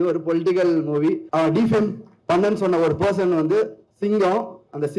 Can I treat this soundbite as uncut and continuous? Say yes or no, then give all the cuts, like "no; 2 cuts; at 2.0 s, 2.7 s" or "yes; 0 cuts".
no; 1 cut; at 1.2 s